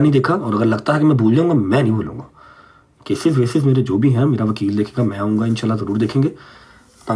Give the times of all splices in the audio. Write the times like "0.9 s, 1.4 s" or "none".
none